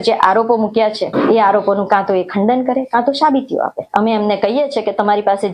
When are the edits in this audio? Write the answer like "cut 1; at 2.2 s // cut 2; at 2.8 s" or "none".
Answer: cut 1; at 1.1 s // cut 2; at 3.8 s